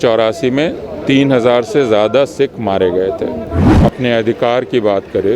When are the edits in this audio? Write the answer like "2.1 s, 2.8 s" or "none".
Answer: 3.7 s